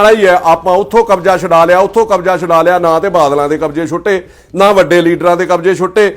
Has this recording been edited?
no; 0 cuts

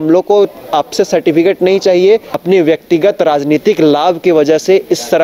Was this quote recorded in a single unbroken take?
no; 1 cut; at 2.3 s

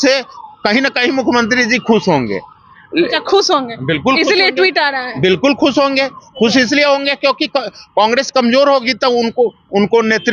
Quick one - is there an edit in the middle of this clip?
no; 0 cuts

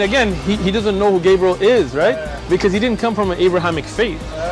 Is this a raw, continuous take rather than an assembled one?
yes; 0 cuts

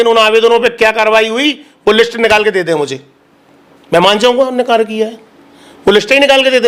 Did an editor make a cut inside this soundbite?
no; 0 cuts

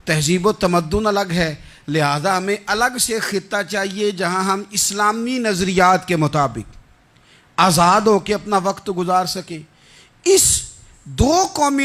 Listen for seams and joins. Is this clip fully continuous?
yes; 0 cuts

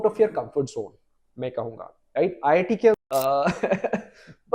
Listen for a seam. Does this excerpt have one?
yes; 1 cut; at 3.0 s

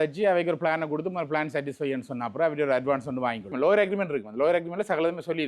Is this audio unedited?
no; 1 cut; at 3.5 s

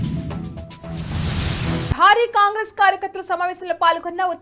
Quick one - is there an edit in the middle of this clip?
no; 0 cuts

